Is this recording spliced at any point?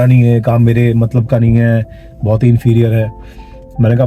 no; 0 cuts

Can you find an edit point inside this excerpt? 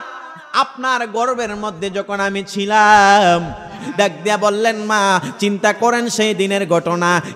yes; 1 cut; at 3.8 s

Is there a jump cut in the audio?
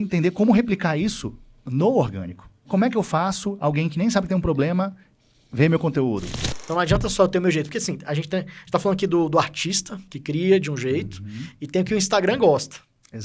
yes; 2 cuts; at 2.7 s, 6.3 s

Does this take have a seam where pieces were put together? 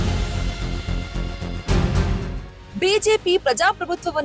no; 0 cuts

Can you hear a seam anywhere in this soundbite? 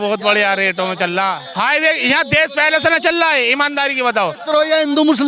yes; 2 cuts; at 1.4 s, 4.4 s

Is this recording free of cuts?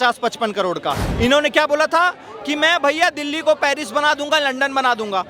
no; 1 cut; at 1.1 s

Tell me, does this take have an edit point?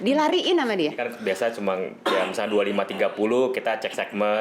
yes; 1 cut; at 1.1 s

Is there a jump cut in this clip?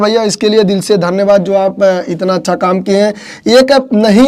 no; 0 cuts

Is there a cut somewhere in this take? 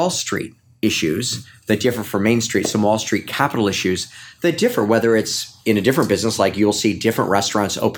no; 0 cuts

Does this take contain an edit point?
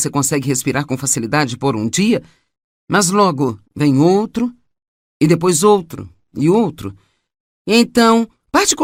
no; 0 cuts

